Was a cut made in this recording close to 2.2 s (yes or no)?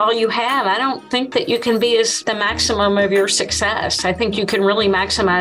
yes